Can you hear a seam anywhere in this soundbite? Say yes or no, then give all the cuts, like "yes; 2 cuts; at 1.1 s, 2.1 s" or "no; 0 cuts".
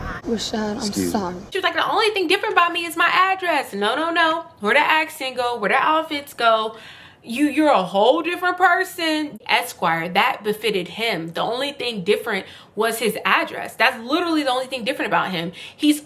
yes; 2 cuts; at 1.5 s, 9.3 s